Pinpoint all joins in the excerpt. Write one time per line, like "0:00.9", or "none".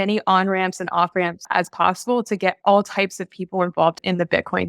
0:01.5
0:04.0